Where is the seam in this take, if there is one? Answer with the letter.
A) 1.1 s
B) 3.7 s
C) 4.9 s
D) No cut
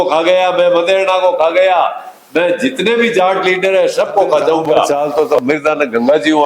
C